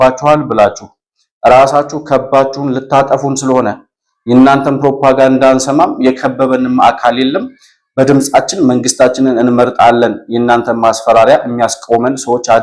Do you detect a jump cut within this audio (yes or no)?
no